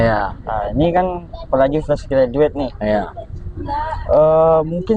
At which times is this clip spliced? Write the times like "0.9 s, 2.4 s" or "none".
none